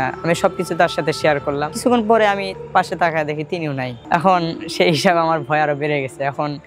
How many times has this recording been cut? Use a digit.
1